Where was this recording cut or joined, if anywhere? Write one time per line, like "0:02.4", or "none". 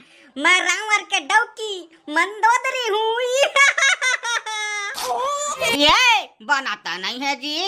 0:05.7

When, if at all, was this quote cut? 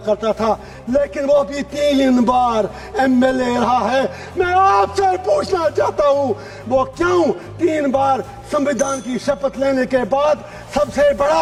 none

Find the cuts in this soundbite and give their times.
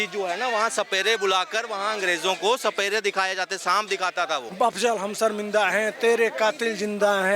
0:04.5

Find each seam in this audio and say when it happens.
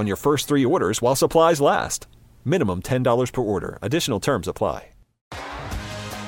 0:05.3

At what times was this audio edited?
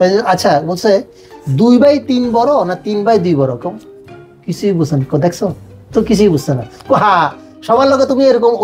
none

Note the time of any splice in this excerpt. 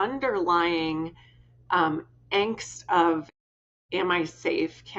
none

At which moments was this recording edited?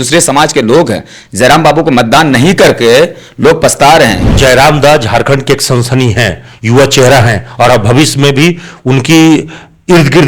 0:04.4

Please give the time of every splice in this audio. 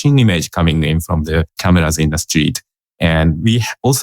0:01.6

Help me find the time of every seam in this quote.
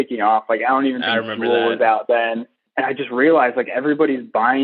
0:02.6

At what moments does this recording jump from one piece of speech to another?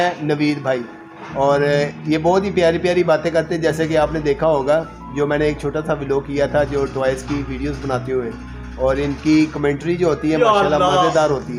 none

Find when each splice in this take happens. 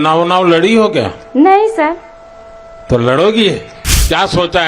0:03.8

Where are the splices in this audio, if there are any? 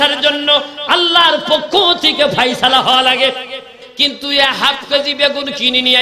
0:03.8

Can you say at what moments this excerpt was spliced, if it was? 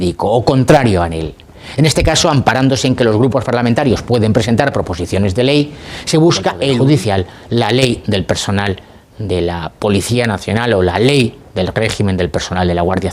0:06.7

